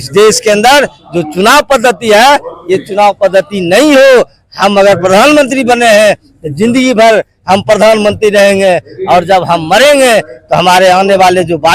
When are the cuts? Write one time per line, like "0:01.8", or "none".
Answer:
none